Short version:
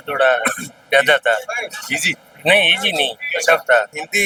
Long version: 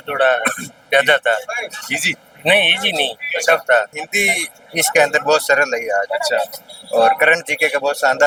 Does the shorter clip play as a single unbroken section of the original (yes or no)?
yes